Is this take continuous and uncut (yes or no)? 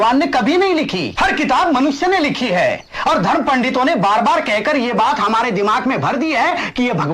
no